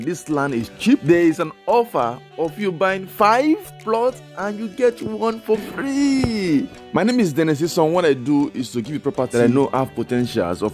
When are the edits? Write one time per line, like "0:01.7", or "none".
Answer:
0:01.0
0:06.8
0:09.3